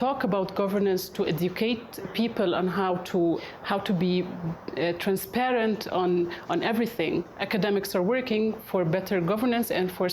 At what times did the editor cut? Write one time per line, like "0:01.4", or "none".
0:07.3